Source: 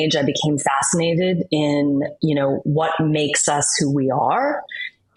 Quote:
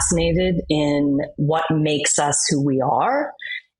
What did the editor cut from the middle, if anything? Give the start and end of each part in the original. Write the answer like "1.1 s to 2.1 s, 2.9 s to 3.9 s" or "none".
2.3 s to 2.7 s